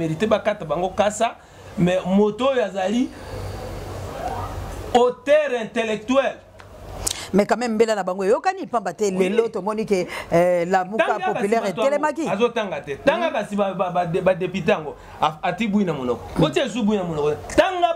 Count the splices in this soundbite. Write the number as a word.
zero